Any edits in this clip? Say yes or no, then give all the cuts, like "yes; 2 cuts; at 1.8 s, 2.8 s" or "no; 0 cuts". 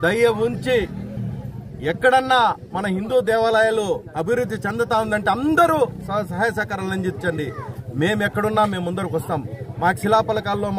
no; 0 cuts